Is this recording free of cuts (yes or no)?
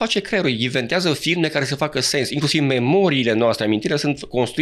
yes